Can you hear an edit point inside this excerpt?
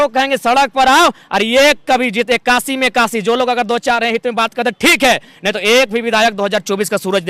no; 0 cuts

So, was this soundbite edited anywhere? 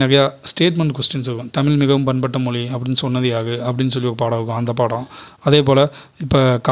no; 0 cuts

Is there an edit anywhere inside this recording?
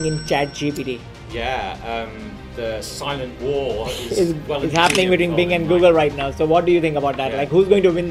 no; 0 cuts

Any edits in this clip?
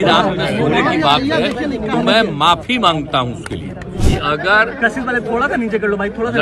yes; 1 cut; at 4.0 s

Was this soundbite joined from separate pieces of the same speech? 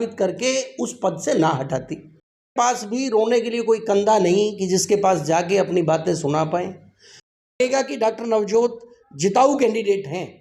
yes; 2 cuts; at 2.5 s, 7.6 s

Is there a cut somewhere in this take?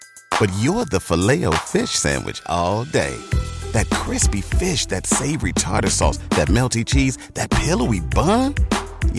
no; 0 cuts

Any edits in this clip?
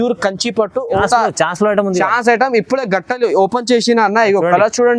yes; 1 cut; at 1.0 s

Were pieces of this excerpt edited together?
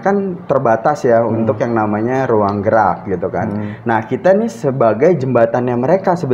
no; 0 cuts

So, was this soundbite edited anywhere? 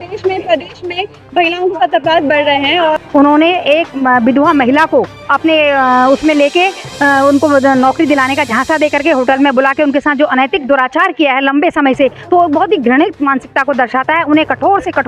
yes; 1 cut; at 3.0 s

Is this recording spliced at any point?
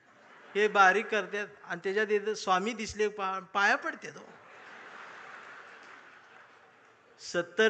no; 0 cuts

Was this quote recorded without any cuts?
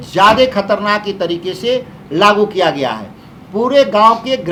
yes; 0 cuts

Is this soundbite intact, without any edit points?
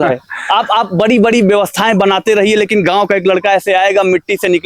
yes; 0 cuts

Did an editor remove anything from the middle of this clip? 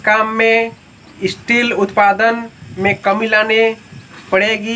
no; 0 cuts

